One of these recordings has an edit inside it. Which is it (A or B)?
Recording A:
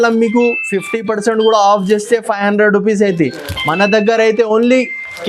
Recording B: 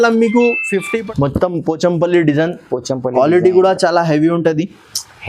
B